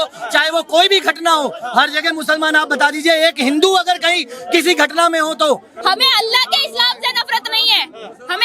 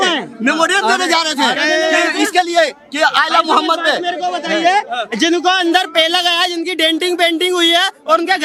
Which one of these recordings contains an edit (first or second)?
first